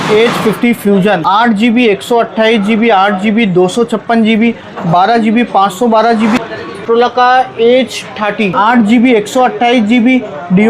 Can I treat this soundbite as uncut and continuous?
no; 3 cuts; at 1.2 s, 6.6 s, 8.5 s

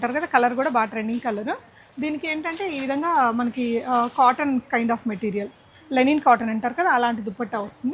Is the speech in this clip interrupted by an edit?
no; 0 cuts

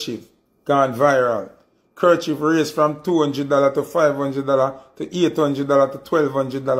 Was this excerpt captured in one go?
yes; 0 cuts

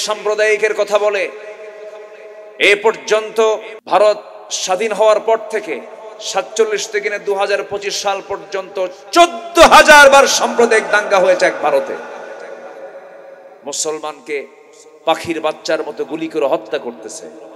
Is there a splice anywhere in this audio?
yes; 1 cut; at 3.7 s

